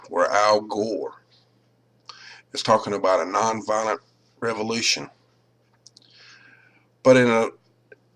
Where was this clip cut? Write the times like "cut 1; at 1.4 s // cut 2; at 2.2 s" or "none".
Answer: cut 1; at 2.6 s